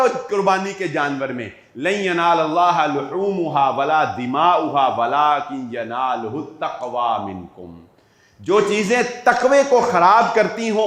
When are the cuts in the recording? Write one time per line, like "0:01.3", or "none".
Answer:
none